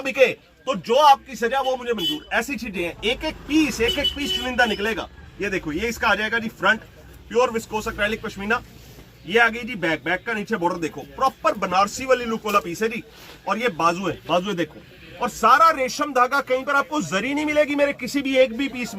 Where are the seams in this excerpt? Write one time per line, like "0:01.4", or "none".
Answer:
none